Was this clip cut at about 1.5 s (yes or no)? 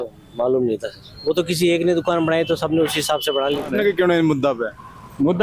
no